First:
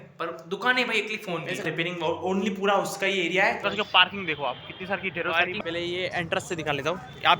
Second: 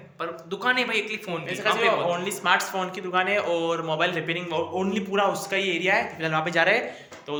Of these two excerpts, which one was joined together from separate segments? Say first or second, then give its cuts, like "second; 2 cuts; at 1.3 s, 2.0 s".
first; 3 cuts; at 1.6 s, 3.7 s, 5.6 s